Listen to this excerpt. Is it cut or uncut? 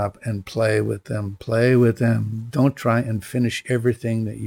uncut